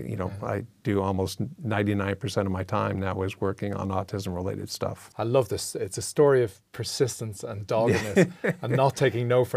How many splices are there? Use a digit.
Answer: 1